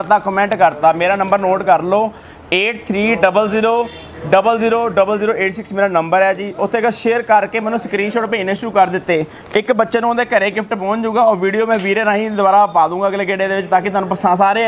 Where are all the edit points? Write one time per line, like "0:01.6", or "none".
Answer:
none